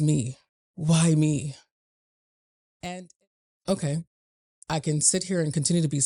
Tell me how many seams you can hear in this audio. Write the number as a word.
one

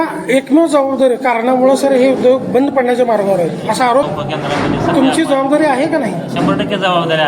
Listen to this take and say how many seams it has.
one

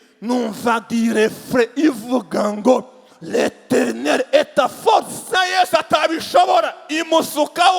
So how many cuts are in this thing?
one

